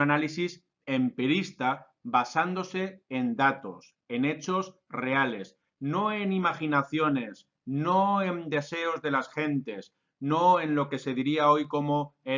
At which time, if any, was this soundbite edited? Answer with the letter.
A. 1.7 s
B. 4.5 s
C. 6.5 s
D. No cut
A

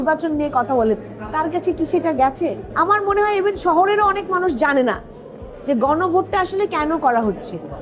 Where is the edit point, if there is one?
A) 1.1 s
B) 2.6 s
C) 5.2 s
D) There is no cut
B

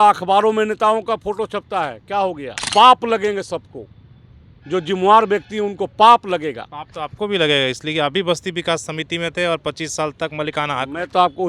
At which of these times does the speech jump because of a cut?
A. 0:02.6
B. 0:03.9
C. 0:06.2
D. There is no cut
A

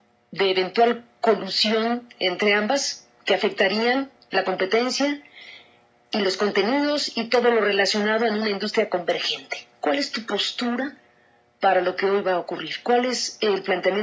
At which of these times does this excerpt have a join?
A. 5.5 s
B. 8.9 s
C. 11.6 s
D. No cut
D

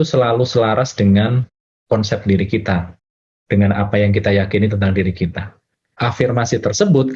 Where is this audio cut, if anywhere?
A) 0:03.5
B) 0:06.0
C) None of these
B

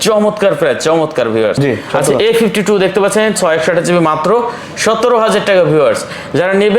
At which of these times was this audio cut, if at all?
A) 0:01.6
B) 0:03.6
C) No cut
A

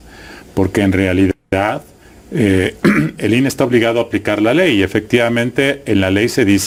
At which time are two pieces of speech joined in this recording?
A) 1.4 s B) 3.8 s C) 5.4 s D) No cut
D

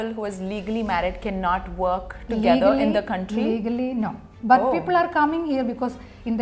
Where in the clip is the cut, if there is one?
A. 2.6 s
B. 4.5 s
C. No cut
C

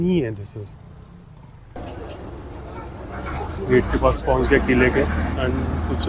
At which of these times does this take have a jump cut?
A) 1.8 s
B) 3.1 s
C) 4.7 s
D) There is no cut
A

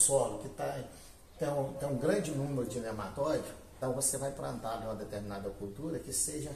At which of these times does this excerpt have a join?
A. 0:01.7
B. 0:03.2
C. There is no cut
B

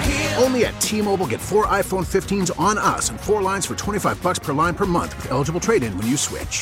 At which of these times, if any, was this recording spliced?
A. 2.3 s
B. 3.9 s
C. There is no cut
C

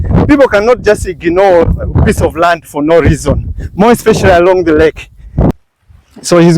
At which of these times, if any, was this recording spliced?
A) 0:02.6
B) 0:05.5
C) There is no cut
B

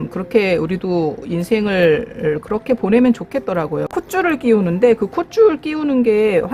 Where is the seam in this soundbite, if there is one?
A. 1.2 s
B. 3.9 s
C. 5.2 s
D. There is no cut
B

